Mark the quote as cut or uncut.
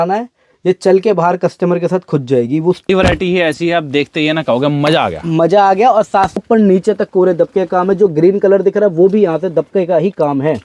cut